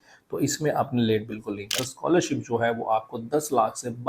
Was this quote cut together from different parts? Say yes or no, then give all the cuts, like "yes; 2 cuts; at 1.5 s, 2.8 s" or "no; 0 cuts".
yes; 1 cut; at 1.8 s